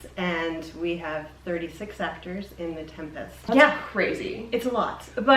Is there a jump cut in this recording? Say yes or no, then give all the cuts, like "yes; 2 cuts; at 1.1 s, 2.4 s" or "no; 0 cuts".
yes; 1 cut; at 3.3 s